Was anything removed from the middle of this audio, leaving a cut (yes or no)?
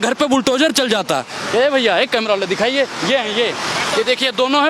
no